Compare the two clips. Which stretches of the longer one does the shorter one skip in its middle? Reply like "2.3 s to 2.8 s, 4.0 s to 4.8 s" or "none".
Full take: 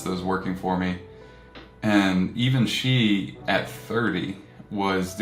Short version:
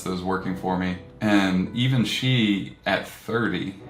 1.1 s to 1.7 s